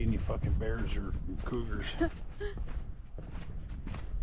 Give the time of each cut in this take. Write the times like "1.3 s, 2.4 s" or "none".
none